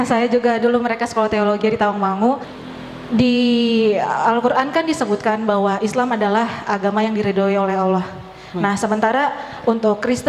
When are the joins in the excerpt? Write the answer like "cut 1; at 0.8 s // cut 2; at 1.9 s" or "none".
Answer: cut 1; at 2.6 s